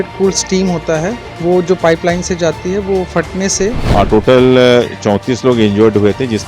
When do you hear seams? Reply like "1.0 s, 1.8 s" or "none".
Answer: 1.3 s, 3.8 s